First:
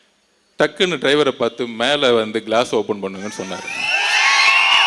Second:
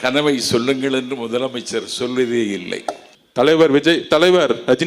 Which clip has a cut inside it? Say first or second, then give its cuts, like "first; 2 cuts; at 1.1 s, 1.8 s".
second; 1 cut; at 3.1 s